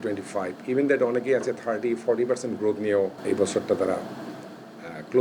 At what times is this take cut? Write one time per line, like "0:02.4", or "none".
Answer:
0:03.2